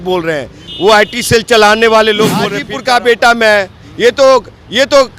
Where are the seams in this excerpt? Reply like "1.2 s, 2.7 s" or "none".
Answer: 2.6 s